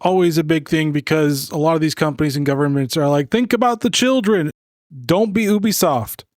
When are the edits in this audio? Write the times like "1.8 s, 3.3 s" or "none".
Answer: 4.5 s